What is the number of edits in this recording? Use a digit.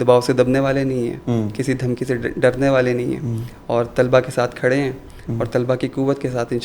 0